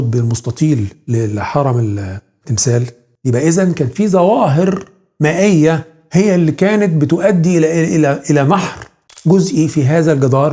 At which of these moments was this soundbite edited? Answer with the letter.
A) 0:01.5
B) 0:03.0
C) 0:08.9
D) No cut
B